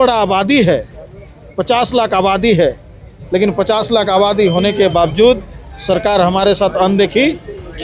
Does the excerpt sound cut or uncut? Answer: uncut